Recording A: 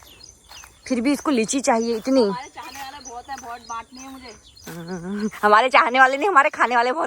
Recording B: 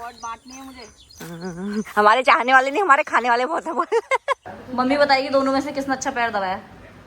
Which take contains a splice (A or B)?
B